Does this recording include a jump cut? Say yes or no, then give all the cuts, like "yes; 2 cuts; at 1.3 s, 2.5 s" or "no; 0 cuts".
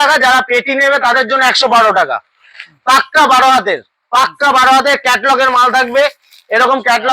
no; 0 cuts